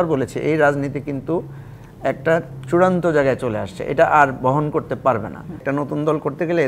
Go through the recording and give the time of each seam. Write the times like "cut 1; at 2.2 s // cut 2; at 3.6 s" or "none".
cut 1; at 5.6 s